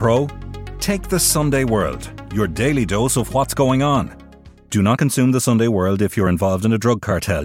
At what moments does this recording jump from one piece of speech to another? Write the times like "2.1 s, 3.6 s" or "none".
none

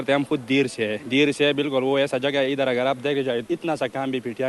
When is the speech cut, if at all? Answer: 1.0 s, 3.4 s

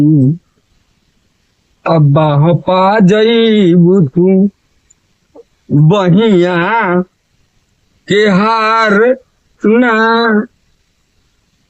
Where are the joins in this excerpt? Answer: none

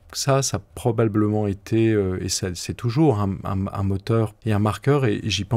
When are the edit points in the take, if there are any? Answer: 4.4 s

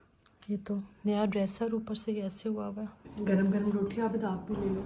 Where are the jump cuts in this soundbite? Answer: 3.0 s

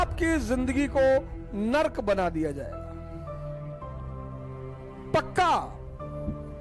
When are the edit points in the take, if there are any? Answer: 5.6 s

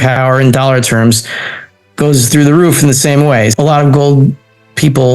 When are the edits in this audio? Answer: 3.5 s

